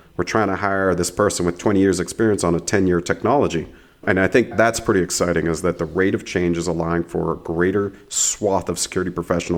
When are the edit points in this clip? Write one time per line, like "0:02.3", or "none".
0:04.0